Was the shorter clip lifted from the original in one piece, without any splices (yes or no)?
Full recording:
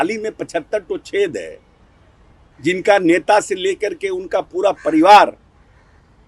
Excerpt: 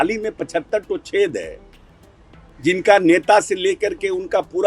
yes